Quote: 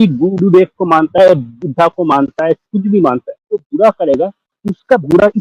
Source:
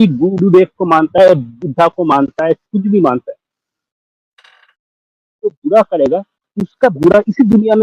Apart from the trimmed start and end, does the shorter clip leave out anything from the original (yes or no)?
yes